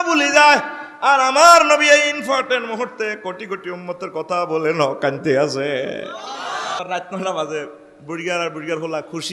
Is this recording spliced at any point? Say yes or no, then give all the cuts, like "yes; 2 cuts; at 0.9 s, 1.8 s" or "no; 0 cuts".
yes; 1 cut; at 6.8 s